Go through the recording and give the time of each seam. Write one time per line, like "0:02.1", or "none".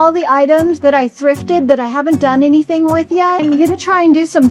0:03.4

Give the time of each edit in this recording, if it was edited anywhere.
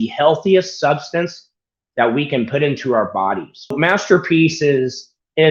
0:03.8

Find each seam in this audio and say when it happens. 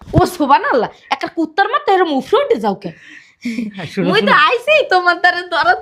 none

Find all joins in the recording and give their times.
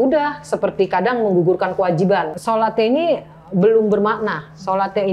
0:02.4

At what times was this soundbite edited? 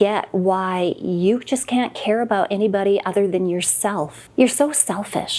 0:04.2

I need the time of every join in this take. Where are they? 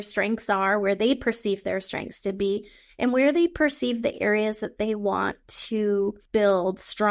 0:06.2

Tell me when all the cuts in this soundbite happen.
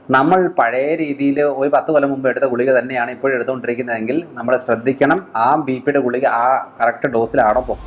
none

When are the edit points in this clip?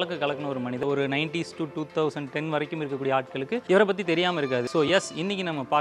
0:00.8
0:03.6
0:04.7

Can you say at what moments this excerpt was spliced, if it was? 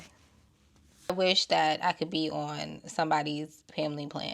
0:01.1

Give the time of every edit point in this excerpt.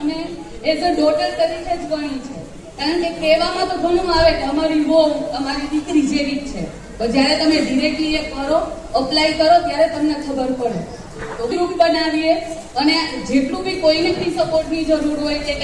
0:11.5

